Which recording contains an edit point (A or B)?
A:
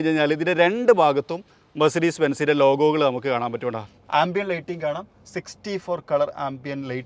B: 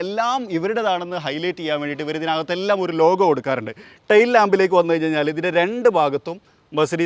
A